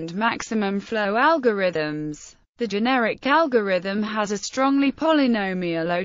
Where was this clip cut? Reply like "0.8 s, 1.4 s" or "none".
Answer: none